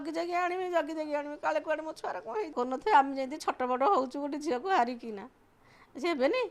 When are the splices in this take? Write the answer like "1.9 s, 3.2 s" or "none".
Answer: 2.5 s